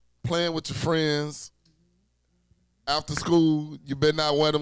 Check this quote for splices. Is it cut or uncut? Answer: uncut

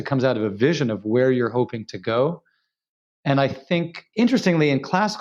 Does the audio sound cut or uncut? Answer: cut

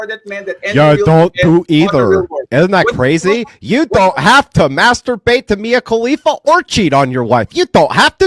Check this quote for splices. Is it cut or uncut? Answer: uncut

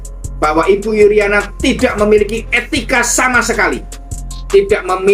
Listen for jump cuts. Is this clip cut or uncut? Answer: uncut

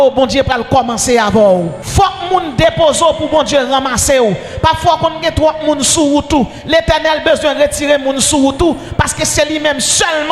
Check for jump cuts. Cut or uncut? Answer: cut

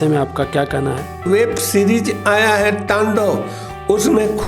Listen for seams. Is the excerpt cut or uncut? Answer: cut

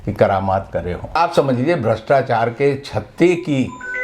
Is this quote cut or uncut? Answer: cut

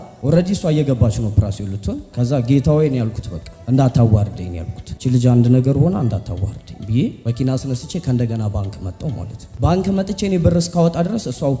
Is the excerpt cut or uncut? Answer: uncut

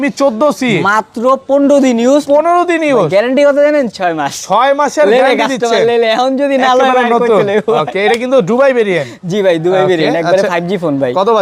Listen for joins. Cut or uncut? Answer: uncut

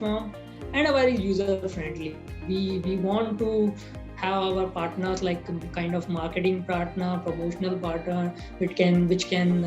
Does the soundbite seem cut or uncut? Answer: cut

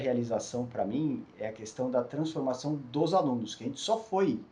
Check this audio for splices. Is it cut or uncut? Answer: uncut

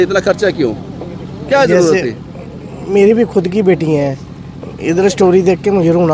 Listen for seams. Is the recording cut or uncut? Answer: uncut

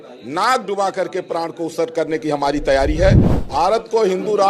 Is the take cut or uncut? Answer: cut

